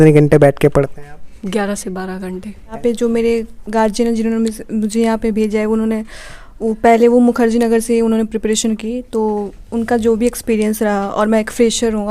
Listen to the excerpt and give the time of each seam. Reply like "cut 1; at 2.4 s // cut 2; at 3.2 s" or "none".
cut 1; at 2.8 s